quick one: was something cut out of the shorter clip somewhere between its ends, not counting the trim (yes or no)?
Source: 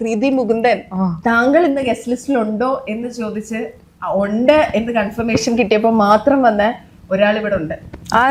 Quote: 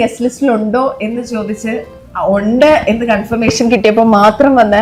no